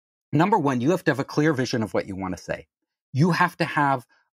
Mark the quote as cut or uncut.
uncut